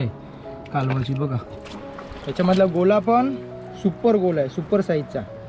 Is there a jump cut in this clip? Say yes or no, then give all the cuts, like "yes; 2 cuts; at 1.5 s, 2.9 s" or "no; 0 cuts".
yes; 1 cut; at 1.6 s